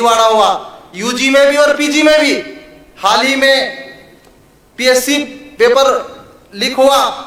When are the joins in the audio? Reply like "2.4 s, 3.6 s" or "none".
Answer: none